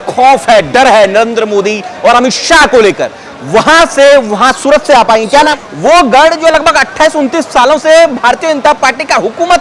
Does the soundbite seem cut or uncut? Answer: cut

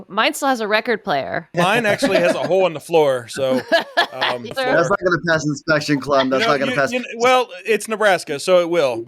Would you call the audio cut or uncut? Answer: cut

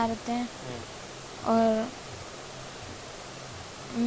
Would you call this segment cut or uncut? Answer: uncut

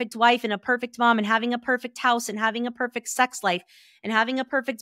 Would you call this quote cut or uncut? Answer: uncut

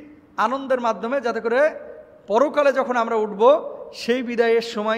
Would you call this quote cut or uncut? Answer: uncut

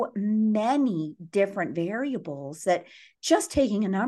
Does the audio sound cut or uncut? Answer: uncut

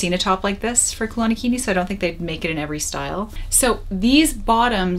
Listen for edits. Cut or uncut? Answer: cut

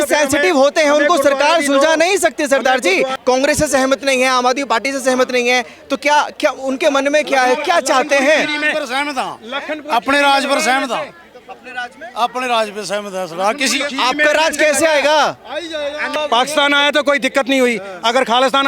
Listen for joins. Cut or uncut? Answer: cut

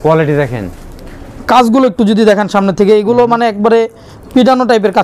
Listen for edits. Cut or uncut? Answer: uncut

